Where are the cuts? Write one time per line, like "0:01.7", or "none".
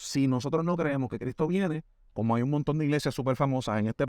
none

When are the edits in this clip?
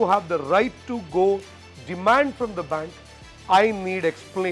none

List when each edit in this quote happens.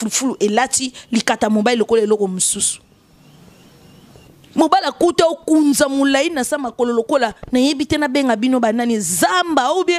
0:04.3

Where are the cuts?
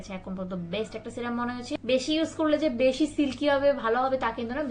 0:01.7

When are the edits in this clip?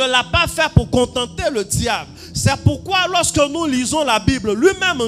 none

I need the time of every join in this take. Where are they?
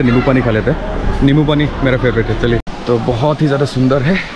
0:02.7

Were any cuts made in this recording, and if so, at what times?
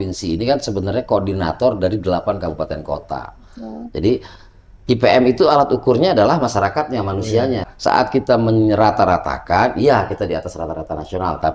0:07.7

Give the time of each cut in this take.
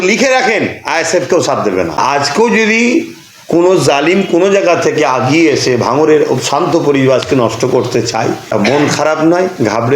0:02.0
0:08.4

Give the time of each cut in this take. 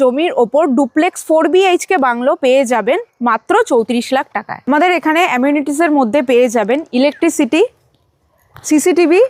none

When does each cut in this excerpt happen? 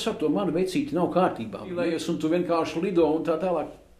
0:01.9

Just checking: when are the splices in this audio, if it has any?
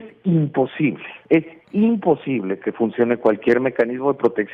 0:01.1

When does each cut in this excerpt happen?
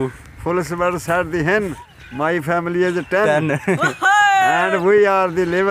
0:01.8

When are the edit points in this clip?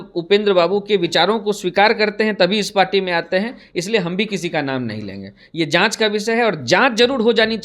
none

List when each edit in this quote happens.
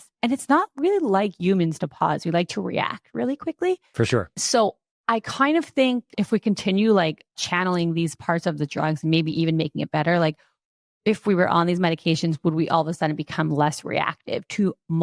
0:04.3
0:06.1
0:07.4

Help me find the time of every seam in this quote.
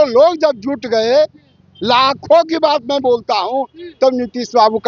none

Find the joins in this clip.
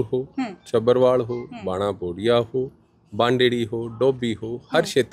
none

